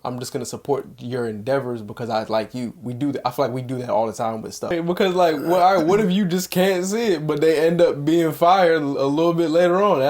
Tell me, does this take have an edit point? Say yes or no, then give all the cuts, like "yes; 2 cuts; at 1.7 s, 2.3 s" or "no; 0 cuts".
yes; 1 cut; at 4.7 s